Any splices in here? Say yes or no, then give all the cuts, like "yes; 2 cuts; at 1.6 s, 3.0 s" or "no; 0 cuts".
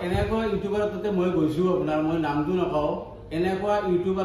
no; 0 cuts